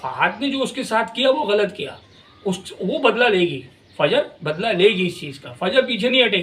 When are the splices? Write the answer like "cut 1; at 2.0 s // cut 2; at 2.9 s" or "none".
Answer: none